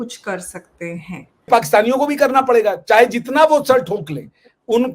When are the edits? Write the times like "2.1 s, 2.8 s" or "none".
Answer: 1.5 s